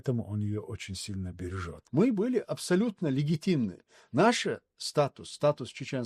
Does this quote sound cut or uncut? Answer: cut